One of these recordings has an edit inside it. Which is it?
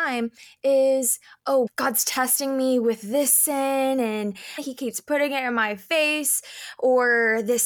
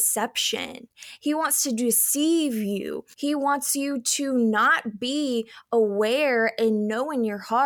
second; 1 cut; at 3.0 s

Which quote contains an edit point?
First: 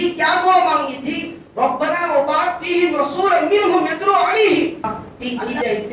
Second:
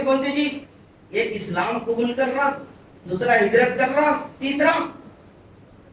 first; 1 cut; at 5.0 s

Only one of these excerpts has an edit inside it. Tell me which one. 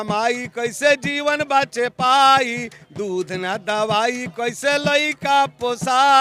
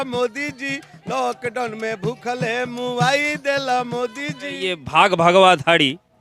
second; 1 cut; at 4.7 s

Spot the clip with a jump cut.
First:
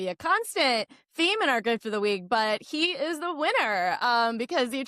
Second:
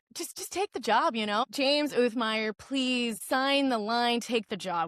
second; 2 cuts; at 1.4 s, 3.2 s

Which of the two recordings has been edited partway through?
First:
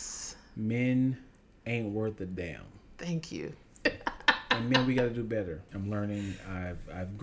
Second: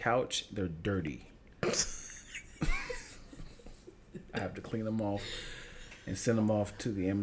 first; 2 cuts; at 3.8 s, 5.7 s

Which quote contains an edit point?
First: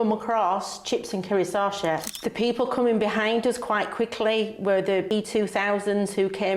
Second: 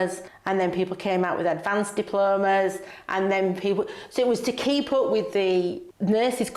first; 1 cut; at 2.1 s

